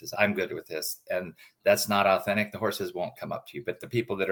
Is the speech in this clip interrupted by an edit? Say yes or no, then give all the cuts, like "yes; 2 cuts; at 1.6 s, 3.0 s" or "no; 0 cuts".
no; 0 cuts